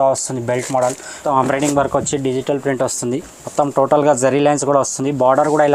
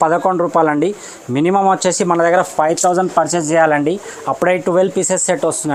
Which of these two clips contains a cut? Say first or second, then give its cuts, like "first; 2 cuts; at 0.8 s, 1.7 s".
first; 1 cut; at 1.1 s